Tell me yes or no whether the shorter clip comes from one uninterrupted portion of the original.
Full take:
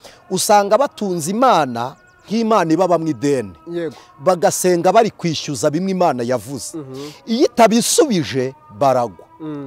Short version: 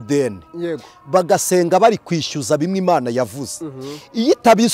yes